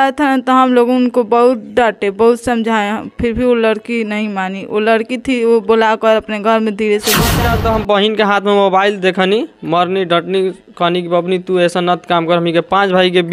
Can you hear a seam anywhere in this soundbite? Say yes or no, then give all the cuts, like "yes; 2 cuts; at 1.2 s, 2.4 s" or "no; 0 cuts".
yes; 1 cut; at 7.4 s